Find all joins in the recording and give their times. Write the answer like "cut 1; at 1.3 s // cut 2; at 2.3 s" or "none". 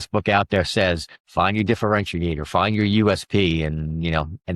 none